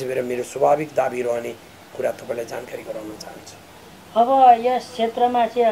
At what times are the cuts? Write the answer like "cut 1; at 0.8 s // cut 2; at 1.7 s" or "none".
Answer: none